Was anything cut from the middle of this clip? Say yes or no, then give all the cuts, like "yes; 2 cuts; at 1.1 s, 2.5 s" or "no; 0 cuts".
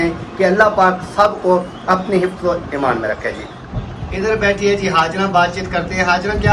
yes; 1 cut; at 3.5 s